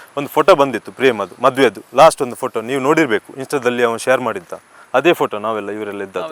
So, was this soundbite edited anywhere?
no; 0 cuts

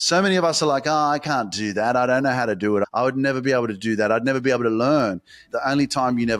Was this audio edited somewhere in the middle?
yes; 2 cuts; at 2.8 s, 5.4 s

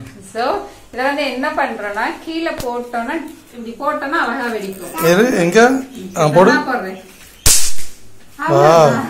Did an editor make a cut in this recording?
no; 0 cuts

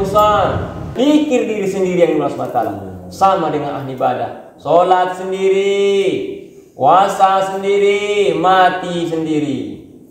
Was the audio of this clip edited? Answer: yes; 1 cut; at 0.9 s

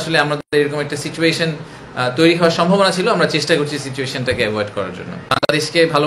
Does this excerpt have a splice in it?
yes; 1 cut; at 5.1 s

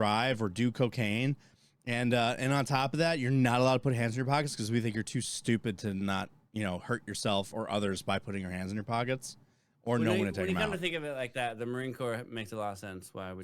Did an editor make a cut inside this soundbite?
no; 0 cuts

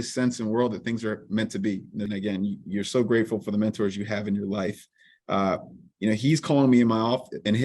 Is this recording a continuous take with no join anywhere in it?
no; 1 cut; at 2.1 s

